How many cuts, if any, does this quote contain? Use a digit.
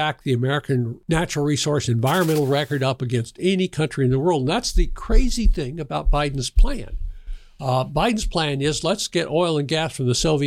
1